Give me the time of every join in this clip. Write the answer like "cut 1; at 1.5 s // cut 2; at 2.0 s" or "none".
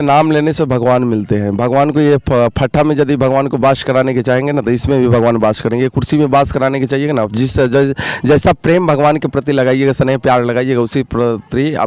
none